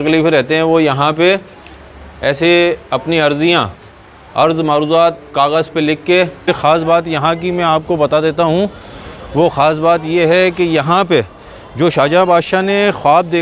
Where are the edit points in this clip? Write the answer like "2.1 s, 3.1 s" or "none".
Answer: 6.5 s